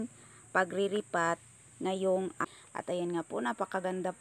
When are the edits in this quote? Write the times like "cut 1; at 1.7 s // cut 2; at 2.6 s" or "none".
cut 1; at 2.4 s